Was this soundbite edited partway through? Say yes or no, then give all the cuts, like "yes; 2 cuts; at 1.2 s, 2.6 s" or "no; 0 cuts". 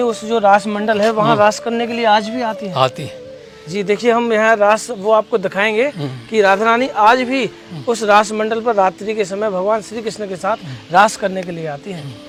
no; 0 cuts